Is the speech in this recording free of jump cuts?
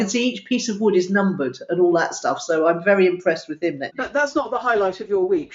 no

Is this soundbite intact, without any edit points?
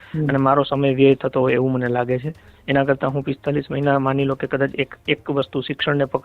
yes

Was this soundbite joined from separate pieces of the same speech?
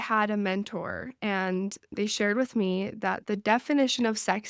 yes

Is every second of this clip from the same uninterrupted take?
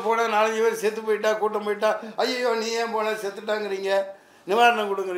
yes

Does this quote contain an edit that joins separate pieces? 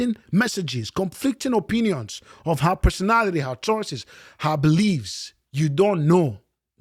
no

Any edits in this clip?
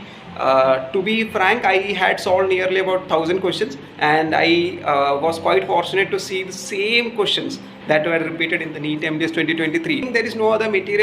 yes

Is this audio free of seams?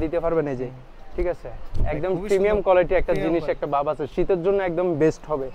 yes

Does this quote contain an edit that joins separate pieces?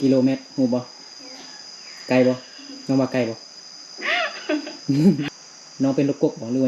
yes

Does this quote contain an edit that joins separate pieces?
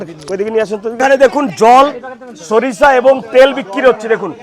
yes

